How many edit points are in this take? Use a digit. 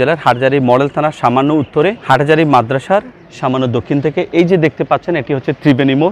1